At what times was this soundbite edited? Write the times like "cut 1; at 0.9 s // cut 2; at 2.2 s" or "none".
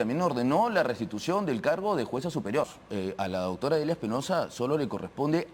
cut 1; at 2.8 s